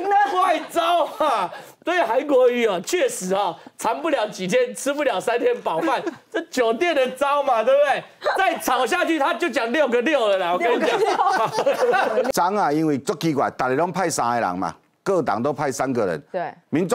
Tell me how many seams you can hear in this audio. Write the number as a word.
one